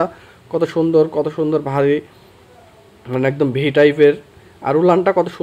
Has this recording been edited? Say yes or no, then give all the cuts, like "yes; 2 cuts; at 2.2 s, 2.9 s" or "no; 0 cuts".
no; 0 cuts